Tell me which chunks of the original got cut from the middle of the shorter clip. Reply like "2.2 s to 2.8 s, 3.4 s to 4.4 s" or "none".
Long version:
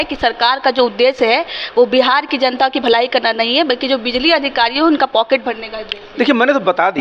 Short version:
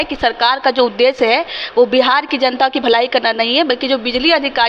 none